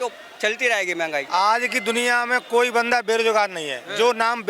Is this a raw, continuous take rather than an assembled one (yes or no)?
no